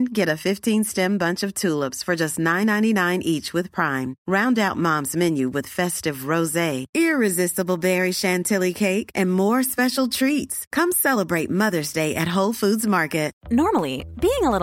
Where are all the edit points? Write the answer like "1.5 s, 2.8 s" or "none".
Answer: none